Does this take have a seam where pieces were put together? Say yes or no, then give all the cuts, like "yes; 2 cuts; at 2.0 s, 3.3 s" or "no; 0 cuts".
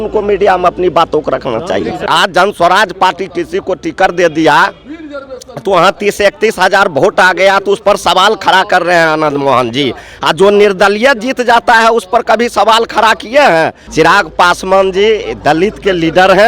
yes; 2 cuts; at 2.0 s, 13.8 s